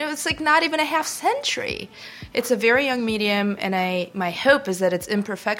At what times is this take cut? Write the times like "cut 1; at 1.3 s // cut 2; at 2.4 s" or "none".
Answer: cut 1; at 2.0 s